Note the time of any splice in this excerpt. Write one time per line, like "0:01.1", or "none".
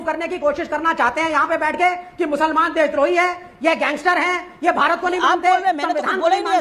none